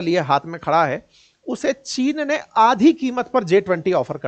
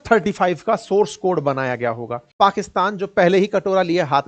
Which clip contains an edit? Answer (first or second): second